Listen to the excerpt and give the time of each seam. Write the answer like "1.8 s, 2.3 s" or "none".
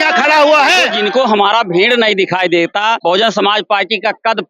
0.9 s, 3.0 s

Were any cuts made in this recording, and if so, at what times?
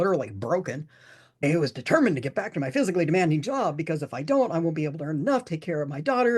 1.4 s

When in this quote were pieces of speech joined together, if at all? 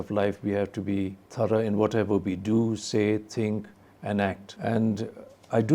1.2 s, 4.5 s

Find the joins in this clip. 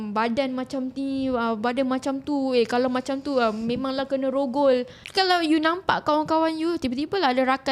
5.0 s

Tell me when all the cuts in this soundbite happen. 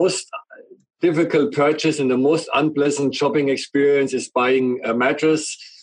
none

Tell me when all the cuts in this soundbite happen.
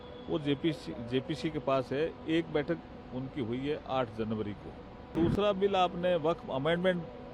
5.1 s

